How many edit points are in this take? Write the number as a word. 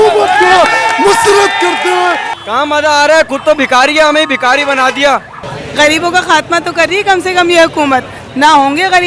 two